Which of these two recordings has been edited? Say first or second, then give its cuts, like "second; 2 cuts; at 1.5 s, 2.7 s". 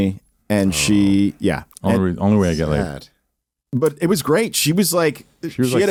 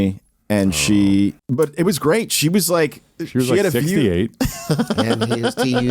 second; 1 cut; at 1.4 s